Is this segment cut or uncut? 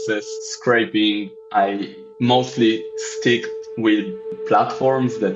cut